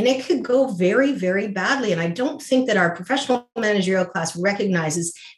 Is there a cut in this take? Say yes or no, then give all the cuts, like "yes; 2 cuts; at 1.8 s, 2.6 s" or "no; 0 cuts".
no; 0 cuts